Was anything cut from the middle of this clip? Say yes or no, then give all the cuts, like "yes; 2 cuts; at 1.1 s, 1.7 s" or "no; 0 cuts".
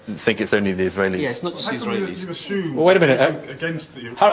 yes; 1 cut; at 1.8 s